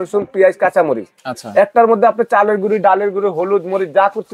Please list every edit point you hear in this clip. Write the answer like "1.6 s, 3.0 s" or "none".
none

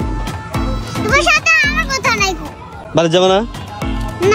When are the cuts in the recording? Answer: 2.8 s

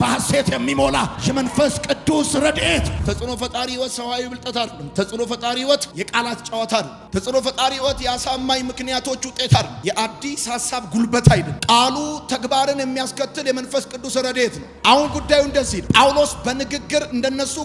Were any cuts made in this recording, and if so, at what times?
3.0 s

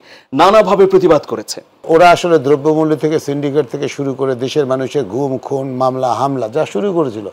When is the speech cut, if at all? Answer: 1.8 s

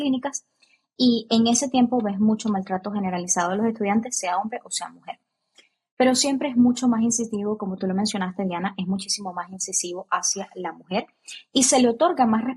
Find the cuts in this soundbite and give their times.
none

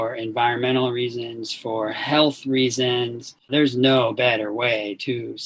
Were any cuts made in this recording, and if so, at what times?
3.5 s

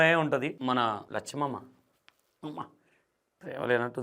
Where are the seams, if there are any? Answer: 0.9 s

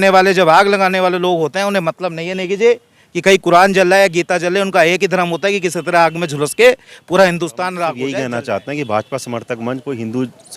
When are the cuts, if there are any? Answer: 8.0 s

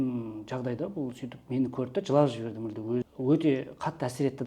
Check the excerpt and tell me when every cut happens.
3.0 s

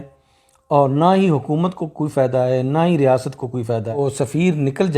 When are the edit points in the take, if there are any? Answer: 4.0 s

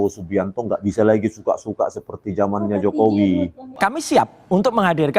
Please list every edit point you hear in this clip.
3.7 s

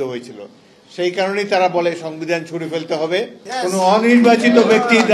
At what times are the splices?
3.4 s

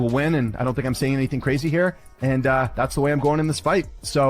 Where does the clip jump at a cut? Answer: 3.0 s

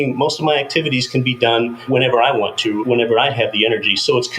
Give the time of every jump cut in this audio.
1.8 s, 2.8 s

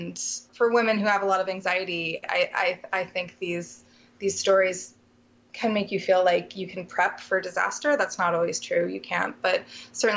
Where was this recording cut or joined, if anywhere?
none

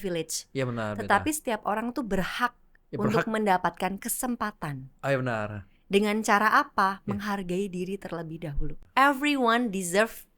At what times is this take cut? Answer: 8.7 s

